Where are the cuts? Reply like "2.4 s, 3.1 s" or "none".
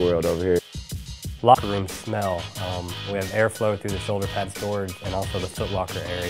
none